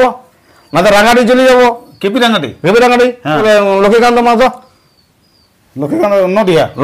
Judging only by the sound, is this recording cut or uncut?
cut